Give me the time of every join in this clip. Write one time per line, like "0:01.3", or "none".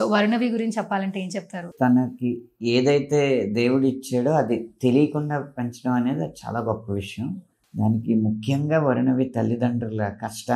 0:01.7
0:07.6

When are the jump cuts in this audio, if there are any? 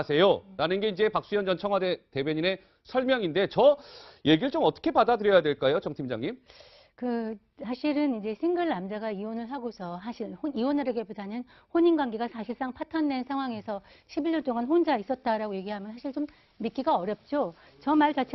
none

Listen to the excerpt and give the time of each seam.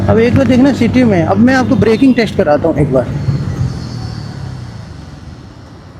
none

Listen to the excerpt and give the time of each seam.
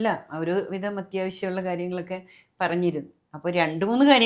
none

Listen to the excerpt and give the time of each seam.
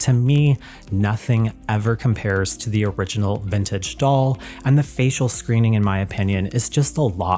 none

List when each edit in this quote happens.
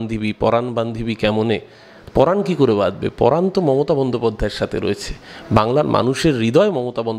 none

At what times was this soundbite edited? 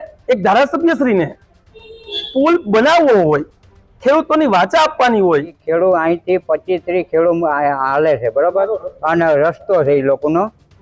0:05.6

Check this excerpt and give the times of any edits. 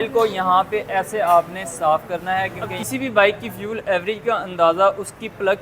0:02.7

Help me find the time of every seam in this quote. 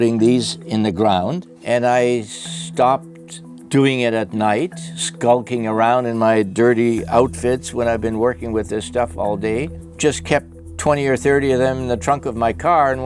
0:01.5

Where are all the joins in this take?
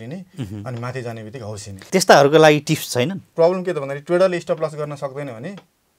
0:01.9
0:03.2

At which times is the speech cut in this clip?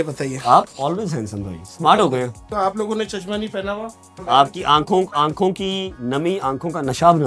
0:02.4
0:04.2

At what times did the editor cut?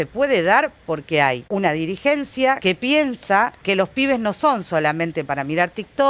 0:01.4
0:02.6
0:03.6

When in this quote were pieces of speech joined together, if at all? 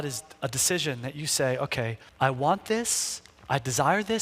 0:02.0

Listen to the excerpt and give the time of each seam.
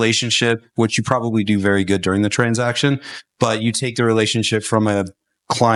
none

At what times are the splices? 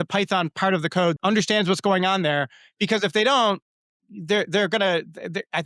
0:01.2

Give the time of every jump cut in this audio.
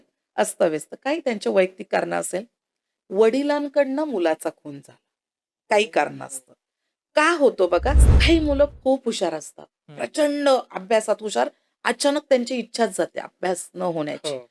0:08.0

